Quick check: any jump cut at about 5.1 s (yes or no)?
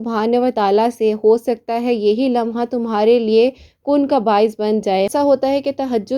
yes